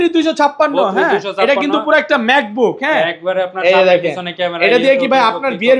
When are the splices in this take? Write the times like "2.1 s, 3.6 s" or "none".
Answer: none